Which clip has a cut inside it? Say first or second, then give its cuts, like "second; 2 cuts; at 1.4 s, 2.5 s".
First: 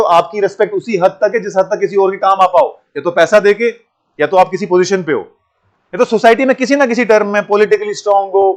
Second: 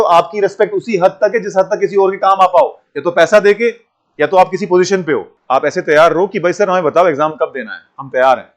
second; 1 cut; at 5.3 s